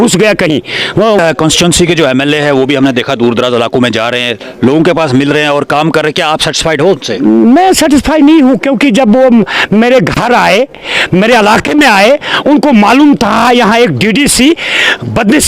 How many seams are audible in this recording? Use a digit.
1